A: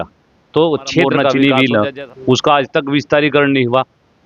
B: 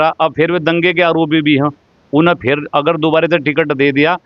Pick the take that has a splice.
A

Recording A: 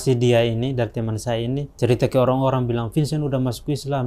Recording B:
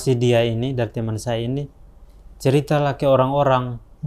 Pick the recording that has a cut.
A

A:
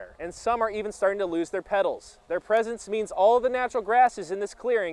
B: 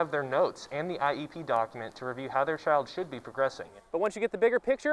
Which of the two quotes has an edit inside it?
B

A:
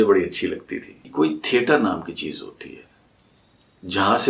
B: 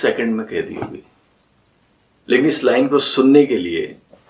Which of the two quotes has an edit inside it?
A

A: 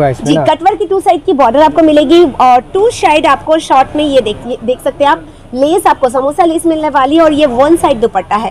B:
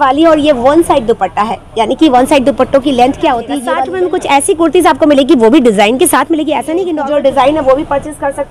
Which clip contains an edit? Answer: B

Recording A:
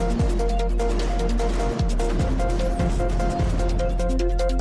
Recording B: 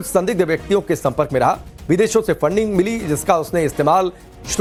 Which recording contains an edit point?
A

